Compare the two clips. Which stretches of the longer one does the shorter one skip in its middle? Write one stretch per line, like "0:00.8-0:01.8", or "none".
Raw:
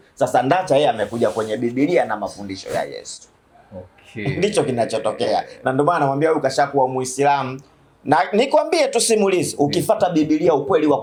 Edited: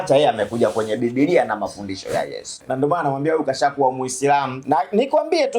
0:03.2-0:05.5
0:07.5-0:08.0